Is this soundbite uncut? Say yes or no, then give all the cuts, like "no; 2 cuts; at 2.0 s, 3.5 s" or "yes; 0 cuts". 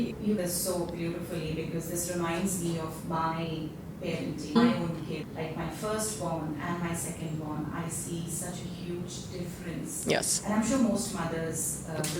yes; 0 cuts